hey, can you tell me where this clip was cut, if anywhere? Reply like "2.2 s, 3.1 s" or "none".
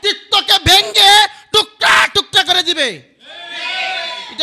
none